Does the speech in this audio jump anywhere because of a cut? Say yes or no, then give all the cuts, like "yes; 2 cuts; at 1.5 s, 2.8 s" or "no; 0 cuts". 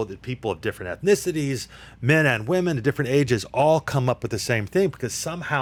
no; 0 cuts